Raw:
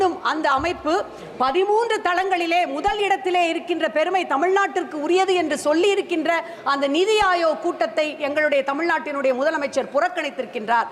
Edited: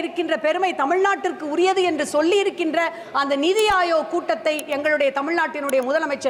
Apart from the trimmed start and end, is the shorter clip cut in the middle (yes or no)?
no